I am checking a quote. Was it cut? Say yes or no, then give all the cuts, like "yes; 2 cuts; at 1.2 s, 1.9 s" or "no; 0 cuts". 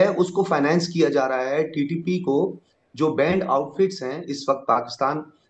no; 0 cuts